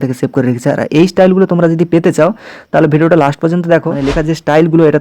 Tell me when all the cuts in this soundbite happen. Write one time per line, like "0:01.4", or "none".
0:04.0